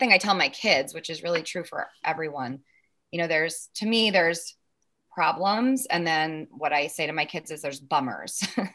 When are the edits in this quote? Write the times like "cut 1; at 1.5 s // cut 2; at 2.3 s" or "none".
none